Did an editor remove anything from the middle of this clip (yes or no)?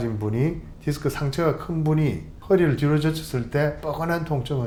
no